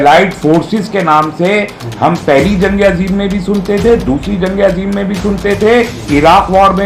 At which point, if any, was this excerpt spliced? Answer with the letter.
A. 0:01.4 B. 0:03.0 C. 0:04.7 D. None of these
D